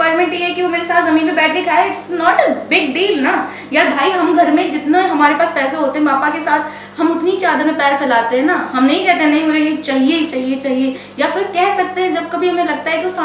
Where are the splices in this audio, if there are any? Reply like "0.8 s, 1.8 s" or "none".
none

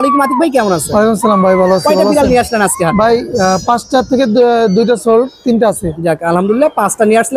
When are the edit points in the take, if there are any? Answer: none

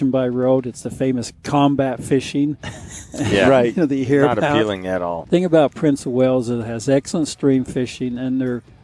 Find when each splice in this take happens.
5.2 s

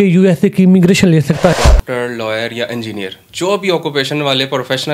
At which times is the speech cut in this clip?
1.5 s

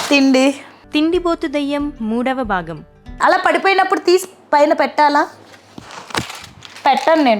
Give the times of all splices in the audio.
3.2 s

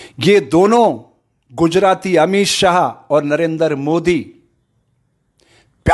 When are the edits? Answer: none

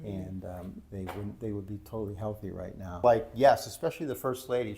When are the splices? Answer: 3.0 s

